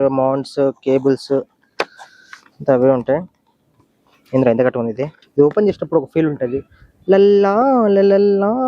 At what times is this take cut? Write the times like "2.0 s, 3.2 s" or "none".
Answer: 5.2 s